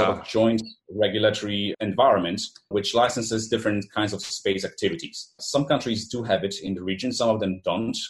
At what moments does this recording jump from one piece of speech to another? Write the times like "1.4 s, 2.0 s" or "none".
1.7 s, 2.7 s, 5.4 s